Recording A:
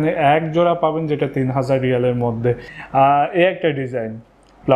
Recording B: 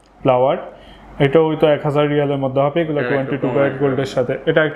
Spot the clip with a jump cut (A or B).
A